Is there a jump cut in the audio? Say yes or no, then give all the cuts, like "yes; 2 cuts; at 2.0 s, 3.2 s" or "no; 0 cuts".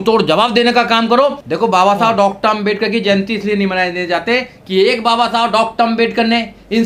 yes; 1 cut; at 1.4 s